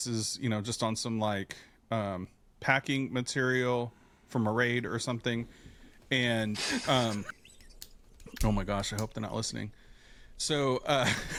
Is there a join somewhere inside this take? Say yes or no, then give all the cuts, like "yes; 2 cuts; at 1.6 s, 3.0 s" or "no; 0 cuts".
no; 0 cuts